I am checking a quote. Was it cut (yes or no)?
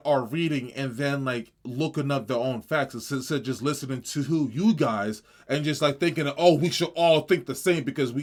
no